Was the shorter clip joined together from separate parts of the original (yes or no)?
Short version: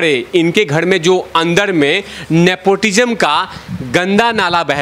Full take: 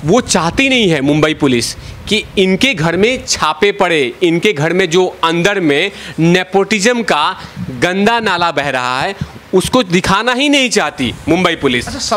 no